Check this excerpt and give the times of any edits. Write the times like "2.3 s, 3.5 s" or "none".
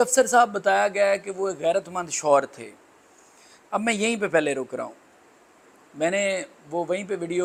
none